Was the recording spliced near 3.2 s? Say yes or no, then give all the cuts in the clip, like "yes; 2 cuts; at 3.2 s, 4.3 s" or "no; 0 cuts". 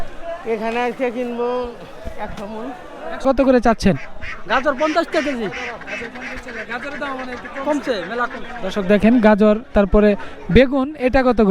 yes; 1 cut; at 3.2 s